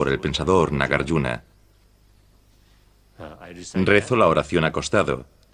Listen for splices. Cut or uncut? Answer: cut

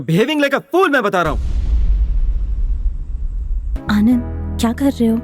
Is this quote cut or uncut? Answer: cut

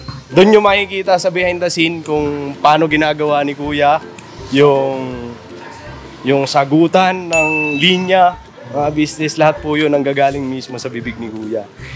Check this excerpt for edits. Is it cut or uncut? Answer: uncut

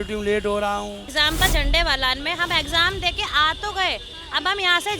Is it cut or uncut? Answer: cut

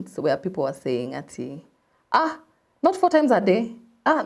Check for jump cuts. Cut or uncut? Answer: uncut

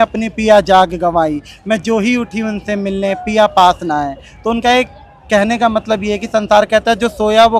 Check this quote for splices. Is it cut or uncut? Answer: uncut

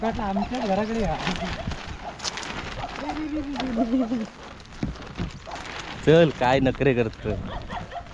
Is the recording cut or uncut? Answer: uncut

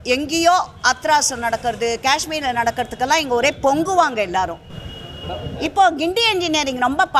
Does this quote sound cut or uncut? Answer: uncut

